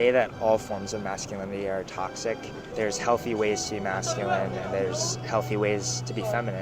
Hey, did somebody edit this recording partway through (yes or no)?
yes